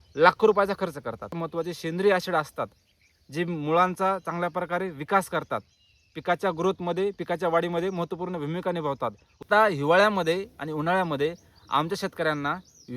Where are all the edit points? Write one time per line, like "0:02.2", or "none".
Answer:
0:01.3
0:09.4